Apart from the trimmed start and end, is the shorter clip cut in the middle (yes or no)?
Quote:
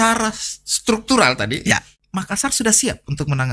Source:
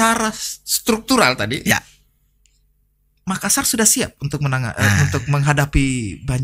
yes